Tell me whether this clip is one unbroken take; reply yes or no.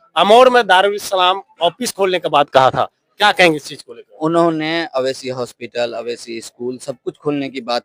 yes